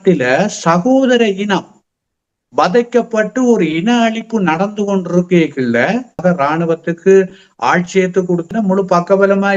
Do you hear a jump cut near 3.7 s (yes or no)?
no